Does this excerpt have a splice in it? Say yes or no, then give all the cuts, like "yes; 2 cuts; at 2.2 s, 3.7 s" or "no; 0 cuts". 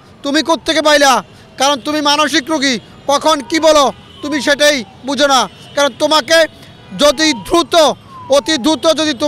no; 0 cuts